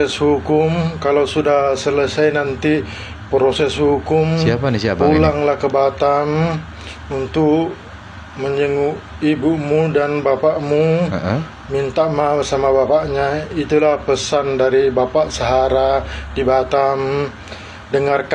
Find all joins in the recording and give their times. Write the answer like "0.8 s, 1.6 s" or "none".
none